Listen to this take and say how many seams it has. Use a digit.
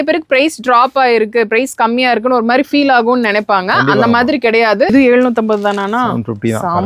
1